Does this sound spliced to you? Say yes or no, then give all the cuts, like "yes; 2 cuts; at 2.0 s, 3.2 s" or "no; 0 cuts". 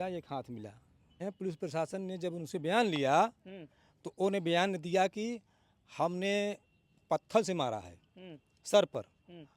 yes; 1 cut; at 1.2 s